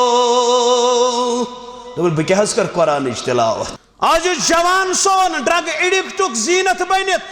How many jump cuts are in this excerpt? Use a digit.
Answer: 1